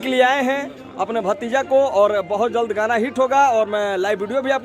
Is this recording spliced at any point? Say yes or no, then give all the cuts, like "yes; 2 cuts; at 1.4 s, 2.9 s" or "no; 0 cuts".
no; 0 cuts